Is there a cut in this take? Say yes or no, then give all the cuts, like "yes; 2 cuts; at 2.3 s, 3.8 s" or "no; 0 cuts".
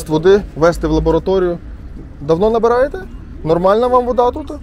no; 0 cuts